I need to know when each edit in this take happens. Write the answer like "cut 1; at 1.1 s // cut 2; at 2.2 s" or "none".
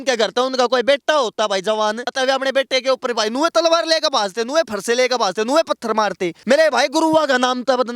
cut 1; at 2.1 s // cut 2; at 6.3 s